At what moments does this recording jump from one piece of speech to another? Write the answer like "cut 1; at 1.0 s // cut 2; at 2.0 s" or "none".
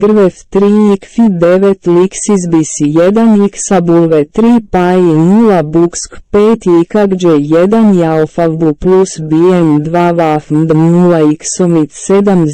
cut 1; at 1.8 s